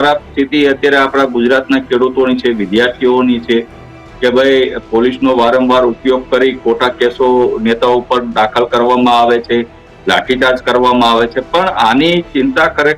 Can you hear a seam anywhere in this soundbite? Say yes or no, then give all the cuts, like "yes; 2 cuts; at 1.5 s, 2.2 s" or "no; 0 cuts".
no; 0 cuts